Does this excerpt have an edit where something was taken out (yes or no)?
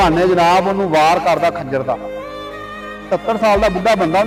no